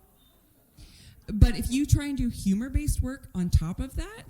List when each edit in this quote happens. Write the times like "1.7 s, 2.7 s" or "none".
1.2 s